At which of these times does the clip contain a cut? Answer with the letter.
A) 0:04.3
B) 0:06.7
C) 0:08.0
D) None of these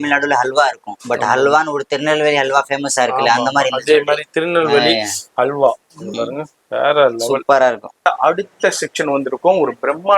C